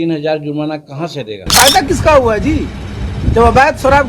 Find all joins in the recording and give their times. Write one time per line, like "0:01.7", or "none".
0:01.3